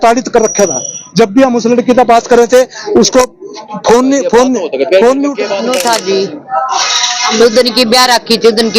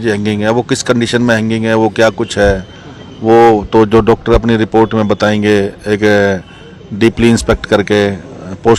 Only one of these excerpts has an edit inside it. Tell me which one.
first; 1 cut; at 5.5 s

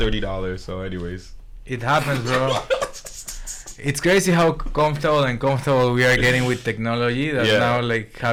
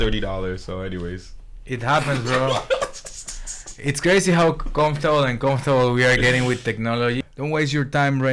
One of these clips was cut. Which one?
second; 1 cut; at 7.2 s

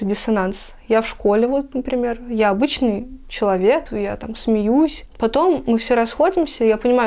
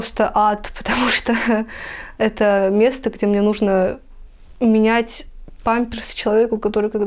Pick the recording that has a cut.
first; 2 cuts; at 3.9 s, 5.0 s

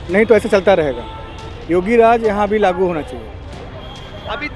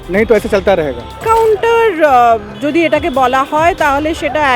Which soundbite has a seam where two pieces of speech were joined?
second; 1 cut; at 1.2 s

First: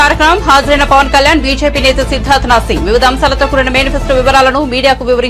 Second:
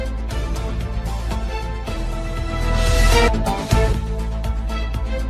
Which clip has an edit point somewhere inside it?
second; 1 cut; at 1.1 s

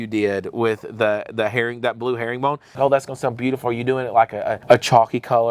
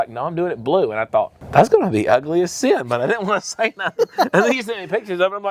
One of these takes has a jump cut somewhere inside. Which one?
first; 2 cuts; at 2.7 s, 4.5 s

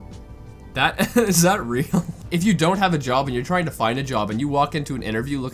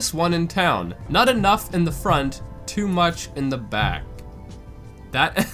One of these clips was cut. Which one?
first; 1 cut; at 2.2 s

